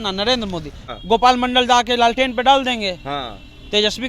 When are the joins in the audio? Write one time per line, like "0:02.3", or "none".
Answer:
0:00.9